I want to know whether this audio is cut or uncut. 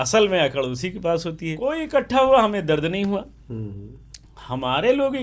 cut